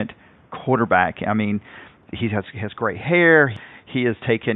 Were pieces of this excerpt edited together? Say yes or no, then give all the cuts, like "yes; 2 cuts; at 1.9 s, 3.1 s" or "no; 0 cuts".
yes; 2 cuts; at 2.1 s, 3.6 s